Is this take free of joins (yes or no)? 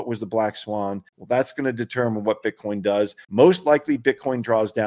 no